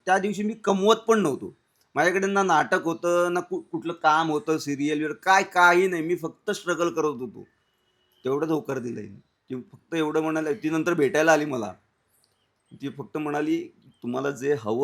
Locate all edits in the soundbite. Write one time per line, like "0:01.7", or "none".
none